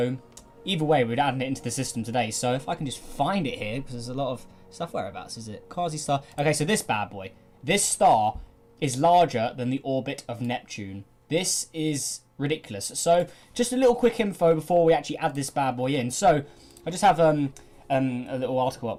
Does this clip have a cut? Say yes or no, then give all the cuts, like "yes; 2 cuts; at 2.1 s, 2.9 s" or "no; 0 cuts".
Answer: no; 0 cuts